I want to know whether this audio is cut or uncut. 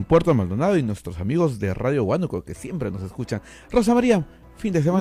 uncut